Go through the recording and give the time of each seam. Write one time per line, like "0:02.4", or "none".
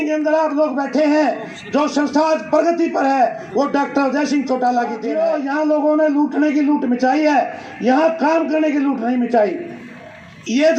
0:05.1

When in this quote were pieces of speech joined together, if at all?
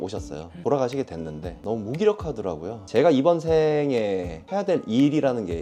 0:02.7

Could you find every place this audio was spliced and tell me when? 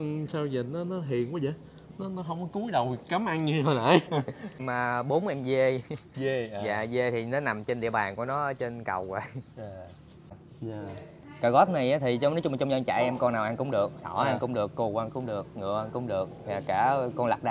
0:04.6
0:10.4

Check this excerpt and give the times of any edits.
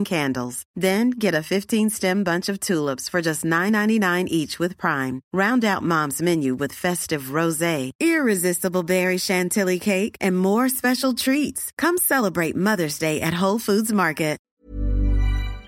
0:14.5

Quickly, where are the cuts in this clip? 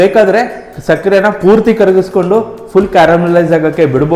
none

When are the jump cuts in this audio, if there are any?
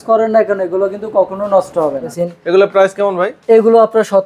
0:02.1

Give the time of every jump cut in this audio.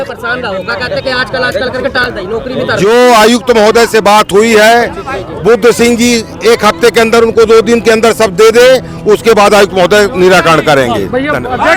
none

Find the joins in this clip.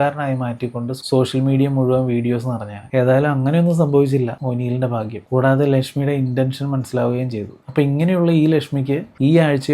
none

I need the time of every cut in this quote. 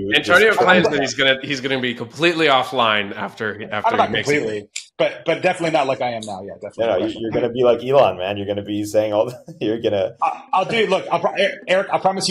none

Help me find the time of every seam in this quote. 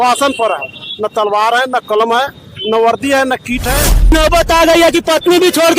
0:04.1

